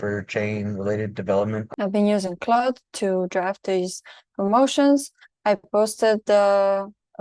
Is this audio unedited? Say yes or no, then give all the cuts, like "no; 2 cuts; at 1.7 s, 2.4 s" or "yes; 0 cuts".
no; 1 cut; at 1.6 s